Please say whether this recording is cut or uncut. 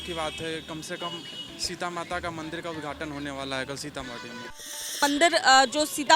cut